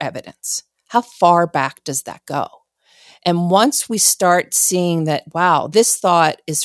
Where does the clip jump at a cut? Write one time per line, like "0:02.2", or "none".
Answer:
0:05.7